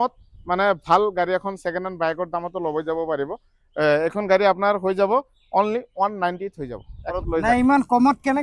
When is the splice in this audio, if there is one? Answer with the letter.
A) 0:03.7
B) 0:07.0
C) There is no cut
B